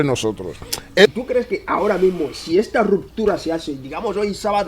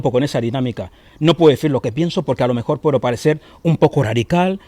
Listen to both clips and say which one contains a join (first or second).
first